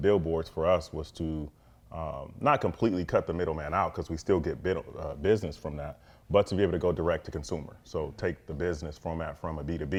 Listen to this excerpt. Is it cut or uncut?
uncut